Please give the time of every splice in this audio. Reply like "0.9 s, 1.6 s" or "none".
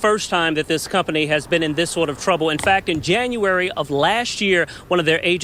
none